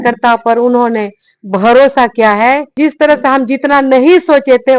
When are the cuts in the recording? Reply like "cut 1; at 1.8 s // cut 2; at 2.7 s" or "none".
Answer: cut 1; at 2.7 s

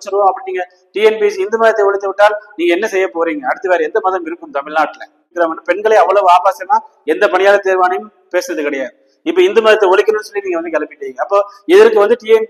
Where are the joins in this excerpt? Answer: cut 1; at 5.3 s

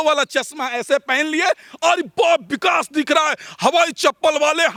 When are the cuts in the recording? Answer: none

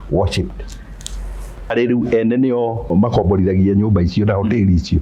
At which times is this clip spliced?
cut 1; at 1.7 s // cut 2; at 2.9 s

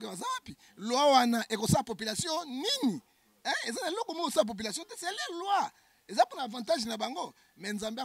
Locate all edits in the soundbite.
none

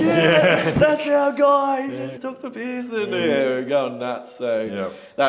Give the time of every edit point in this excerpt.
cut 1; at 2.1 s

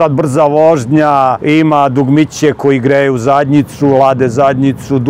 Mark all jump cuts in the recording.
cut 1; at 1.4 s

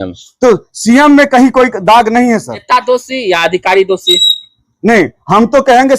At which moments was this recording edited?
cut 1; at 2.6 s

